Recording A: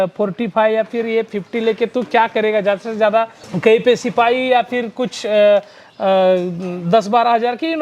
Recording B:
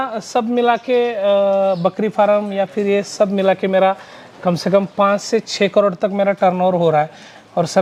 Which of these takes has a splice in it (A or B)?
A